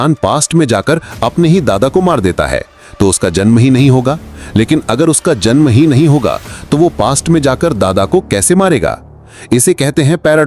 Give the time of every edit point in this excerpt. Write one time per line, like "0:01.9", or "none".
none